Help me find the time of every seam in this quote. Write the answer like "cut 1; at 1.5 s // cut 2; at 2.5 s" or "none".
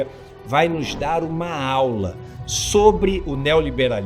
none